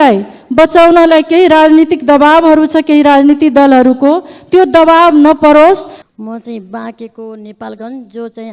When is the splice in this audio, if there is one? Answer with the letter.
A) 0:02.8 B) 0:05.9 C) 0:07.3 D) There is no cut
D